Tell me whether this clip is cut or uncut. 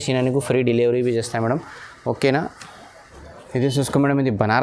uncut